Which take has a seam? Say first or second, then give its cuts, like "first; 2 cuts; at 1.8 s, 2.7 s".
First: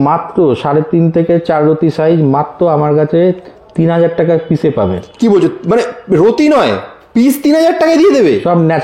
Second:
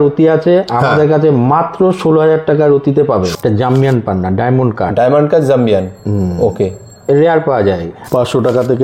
second; 2 cuts; at 3.3 s, 7.9 s